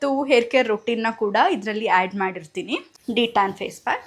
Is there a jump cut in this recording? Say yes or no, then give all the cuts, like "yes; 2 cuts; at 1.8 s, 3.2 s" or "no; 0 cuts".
yes; 1 cut; at 2.9 s